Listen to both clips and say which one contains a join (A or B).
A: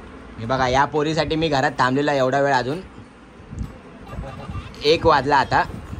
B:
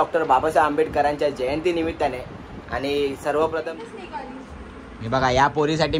B